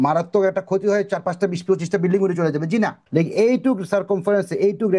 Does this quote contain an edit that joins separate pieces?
yes; 1 cut; at 3.0 s

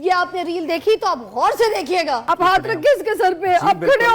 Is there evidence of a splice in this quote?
yes; 1 cut; at 2.2 s

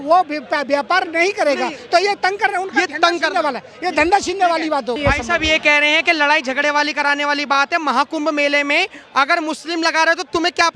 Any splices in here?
no; 0 cuts

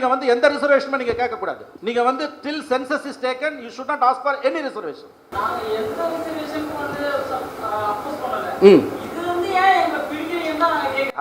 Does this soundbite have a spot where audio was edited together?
yes; 1 cut; at 1.7 s

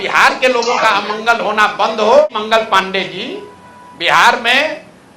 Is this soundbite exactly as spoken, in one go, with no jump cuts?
no; 1 cut; at 2.3 s

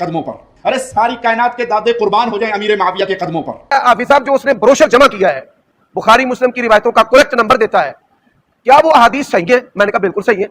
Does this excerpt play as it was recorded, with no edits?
no; 1 cut; at 3.6 s

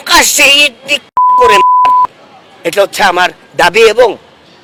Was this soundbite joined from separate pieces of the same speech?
no; 0 cuts

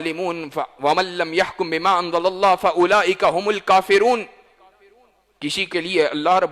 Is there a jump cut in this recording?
no; 0 cuts

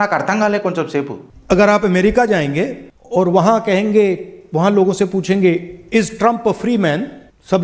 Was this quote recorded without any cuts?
yes; 0 cuts

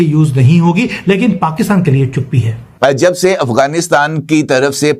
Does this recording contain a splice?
yes; 1 cut; at 2.6 s

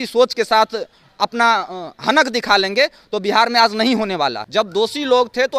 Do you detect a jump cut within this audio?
yes; 1 cut; at 4.4 s

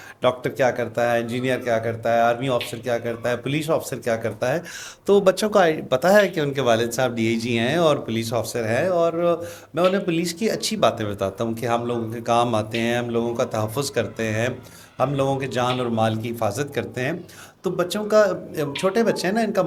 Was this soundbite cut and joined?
no; 0 cuts

